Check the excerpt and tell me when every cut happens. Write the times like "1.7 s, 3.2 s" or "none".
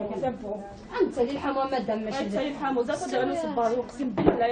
1.9 s